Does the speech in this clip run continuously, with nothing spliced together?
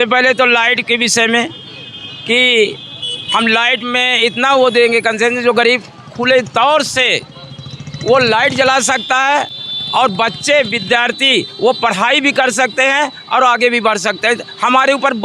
yes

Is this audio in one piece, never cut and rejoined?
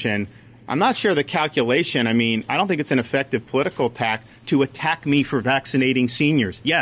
yes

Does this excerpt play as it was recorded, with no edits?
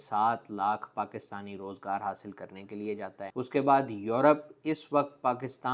yes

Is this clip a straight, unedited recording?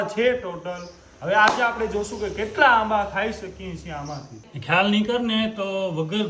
no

